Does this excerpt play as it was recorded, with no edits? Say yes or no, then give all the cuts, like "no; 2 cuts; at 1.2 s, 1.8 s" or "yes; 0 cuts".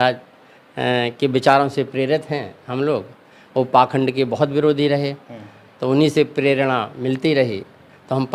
yes; 0 cuts